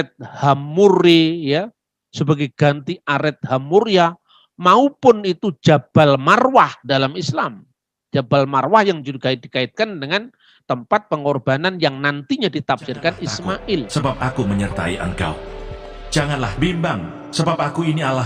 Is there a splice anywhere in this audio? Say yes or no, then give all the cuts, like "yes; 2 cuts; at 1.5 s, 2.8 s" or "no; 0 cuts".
yes; 1 cut; at 13.9 s